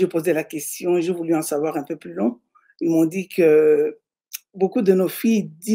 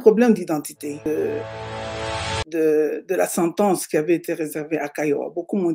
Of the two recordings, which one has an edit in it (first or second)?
second